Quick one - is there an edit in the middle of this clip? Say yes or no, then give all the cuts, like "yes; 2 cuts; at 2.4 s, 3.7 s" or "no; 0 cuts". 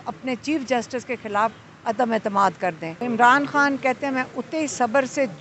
yes; 1 cut; at 2.9 s